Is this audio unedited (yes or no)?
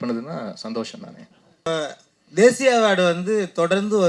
no